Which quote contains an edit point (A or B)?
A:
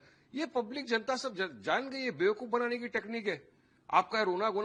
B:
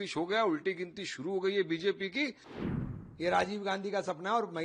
B